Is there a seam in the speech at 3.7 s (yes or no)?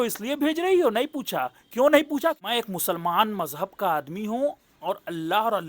no